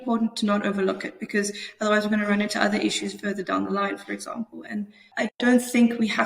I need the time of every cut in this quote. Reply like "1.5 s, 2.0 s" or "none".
5.0 s